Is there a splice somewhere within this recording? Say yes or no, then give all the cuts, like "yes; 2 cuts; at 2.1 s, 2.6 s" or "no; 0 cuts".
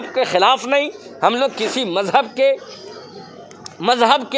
no; 0 cuts